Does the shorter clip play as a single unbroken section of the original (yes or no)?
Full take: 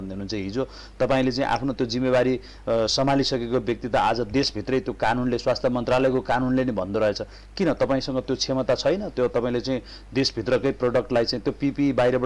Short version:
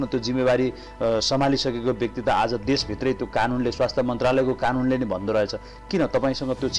yes